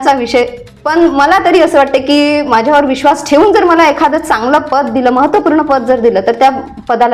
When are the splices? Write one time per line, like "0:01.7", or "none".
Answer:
none